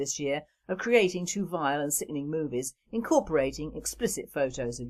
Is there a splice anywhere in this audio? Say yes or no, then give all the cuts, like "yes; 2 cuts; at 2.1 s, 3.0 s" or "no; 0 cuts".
no; 0 cuts